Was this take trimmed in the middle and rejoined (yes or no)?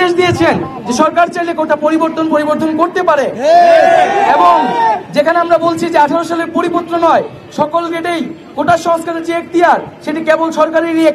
no